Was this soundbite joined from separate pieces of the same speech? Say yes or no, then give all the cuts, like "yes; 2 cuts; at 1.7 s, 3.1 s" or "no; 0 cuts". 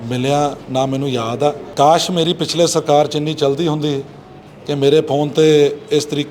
yes; 1 cut; at 1.6 s